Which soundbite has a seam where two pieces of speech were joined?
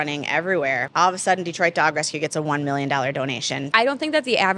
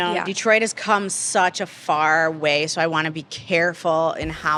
first; 2 cuts; at 0.8 s, 3.5 s

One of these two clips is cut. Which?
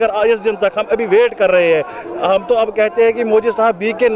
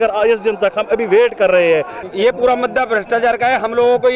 second; 1 cut; at 2.0 s

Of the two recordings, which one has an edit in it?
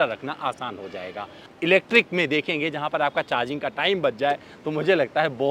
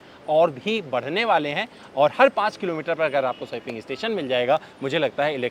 first; 1 cut; at 1.4 s

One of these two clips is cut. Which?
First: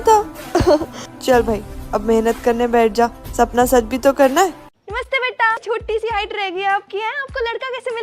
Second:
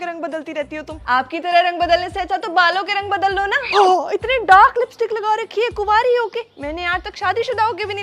first; 1 cut; at 4.7 s

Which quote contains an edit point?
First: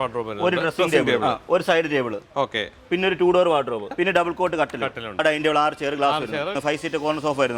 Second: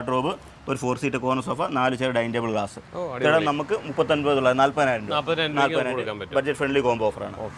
first; 4 cuts; at 1.1 s, 3.9 s, 5.2 s, 6.5 s

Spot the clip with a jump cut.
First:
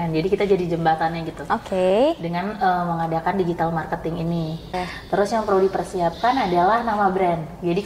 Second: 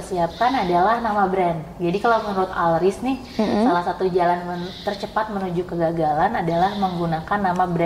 first; 1 cut; at 4.7 s

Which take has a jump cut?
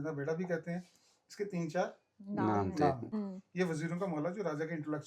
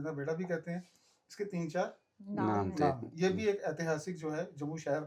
first; 1 cut; at 3.1 s

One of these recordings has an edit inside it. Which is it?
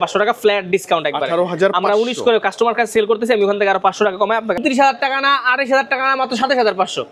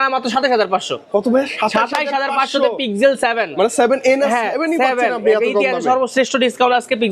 first; 1 cut; at 4.6 s

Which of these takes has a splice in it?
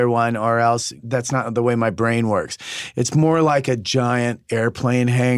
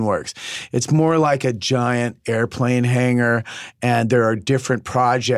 first; 1 cut; at 1.0 s

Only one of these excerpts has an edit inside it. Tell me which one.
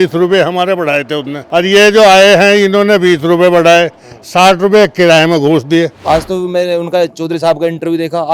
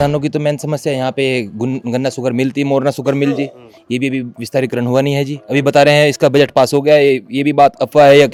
first; 2 cuts; at 1.3 s, 6.0 s

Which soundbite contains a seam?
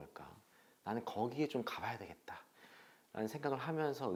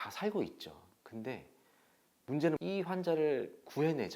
second; 1 cut; at 2.6 s

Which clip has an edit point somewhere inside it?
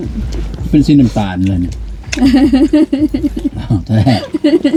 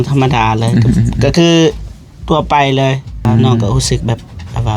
second; 1 cut; at 3.3 s

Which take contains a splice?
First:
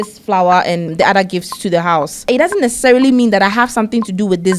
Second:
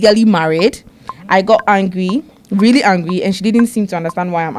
first; 2 cuts; at 0.9 s, 2.3 s

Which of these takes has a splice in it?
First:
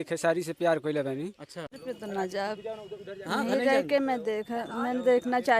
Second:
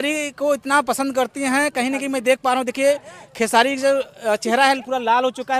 first; 1 cut; at 1.7 s

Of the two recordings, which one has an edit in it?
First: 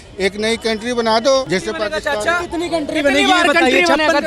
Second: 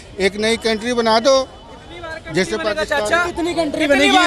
first; 1 cut; at 1.5 s

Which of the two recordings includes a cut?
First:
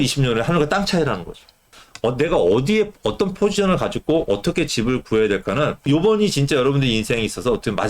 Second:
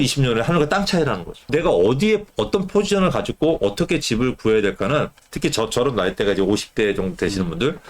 second; 2 cuts; at 1.5 s, 5.1 s

